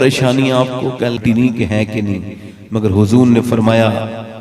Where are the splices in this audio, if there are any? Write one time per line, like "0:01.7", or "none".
0:01.2